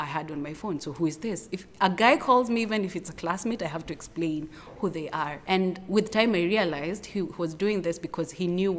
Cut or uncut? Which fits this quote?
uncut